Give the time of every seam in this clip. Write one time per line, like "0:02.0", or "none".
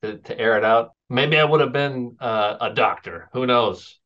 0:01.0